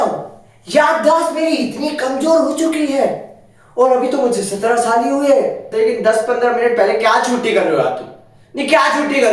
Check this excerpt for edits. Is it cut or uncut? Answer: cut